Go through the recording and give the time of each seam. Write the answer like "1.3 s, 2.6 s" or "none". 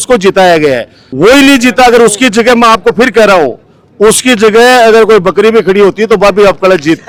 none